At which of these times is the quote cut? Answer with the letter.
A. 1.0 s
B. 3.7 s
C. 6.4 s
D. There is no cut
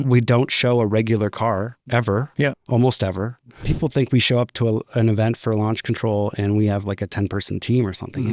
B